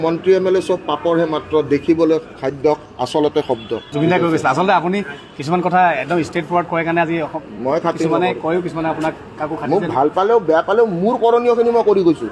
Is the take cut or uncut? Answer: uncut